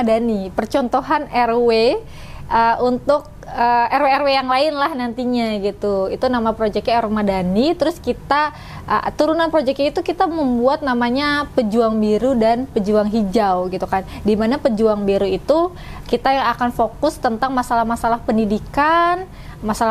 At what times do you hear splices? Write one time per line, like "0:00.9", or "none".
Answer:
none